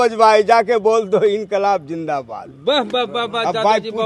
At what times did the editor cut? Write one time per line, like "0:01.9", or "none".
none